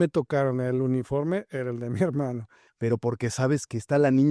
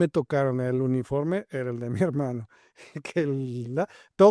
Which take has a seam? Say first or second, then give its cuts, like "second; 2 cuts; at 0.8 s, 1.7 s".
first; 1 cut; at 2.6 s